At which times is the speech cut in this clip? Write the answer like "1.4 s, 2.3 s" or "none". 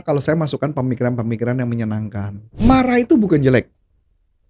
2.4 s